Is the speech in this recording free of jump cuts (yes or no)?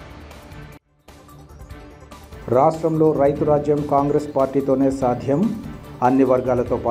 no